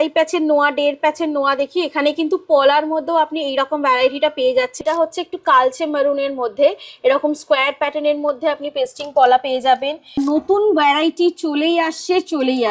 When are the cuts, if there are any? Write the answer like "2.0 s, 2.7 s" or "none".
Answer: 4.8 s, 10.2 s